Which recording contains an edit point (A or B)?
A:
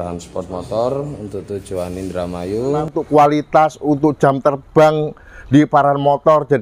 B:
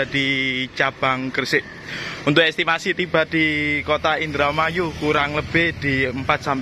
A